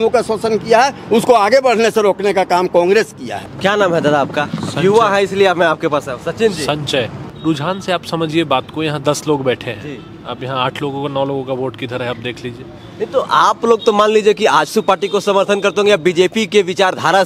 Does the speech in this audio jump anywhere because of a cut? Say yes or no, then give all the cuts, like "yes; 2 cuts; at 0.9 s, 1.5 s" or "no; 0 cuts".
no; 0 cuts